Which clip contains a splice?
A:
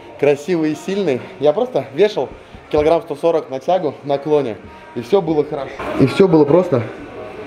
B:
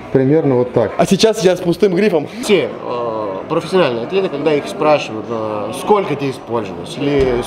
B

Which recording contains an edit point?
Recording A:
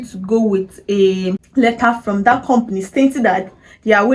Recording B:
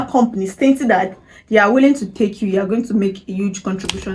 A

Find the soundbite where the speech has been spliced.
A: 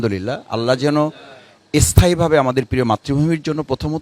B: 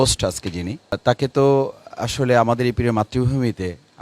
B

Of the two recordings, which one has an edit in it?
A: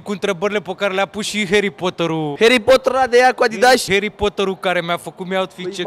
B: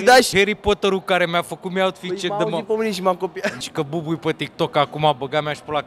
B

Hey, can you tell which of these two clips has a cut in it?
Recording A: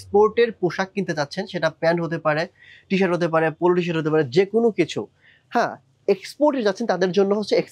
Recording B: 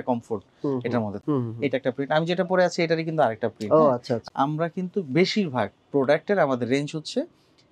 B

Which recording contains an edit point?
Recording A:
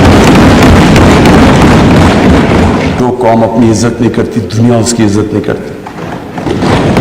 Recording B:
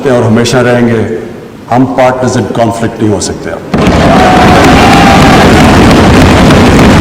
A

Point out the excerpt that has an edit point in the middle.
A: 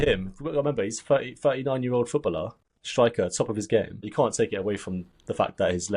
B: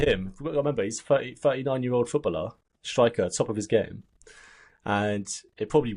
A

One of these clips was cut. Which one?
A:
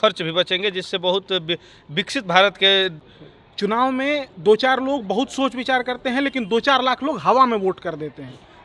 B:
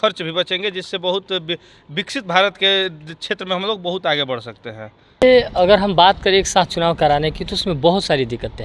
A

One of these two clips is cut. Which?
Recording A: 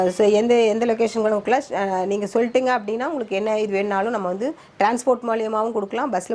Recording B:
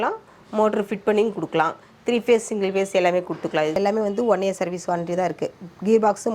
B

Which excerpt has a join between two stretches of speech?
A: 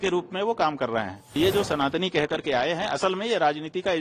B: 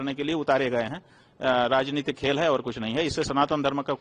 A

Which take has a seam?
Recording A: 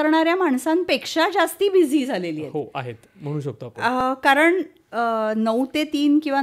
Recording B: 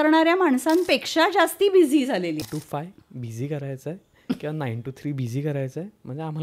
B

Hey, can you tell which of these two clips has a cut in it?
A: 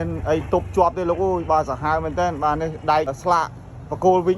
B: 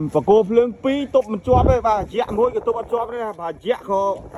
A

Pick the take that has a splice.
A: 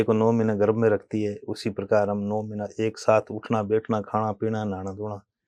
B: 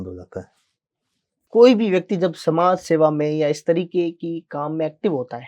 B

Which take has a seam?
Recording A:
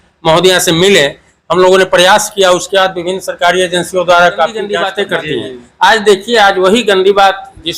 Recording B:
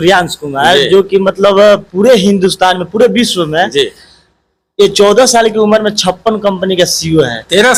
A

